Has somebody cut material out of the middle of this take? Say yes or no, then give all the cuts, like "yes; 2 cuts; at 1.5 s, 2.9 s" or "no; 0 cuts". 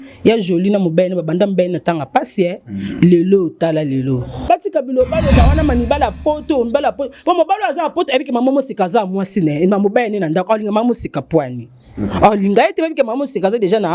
yes; 1 cut; at 4.3 s